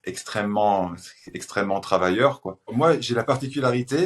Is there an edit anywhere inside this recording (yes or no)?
yes